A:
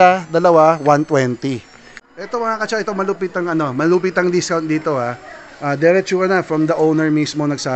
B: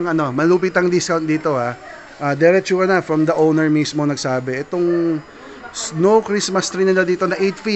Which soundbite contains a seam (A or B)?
A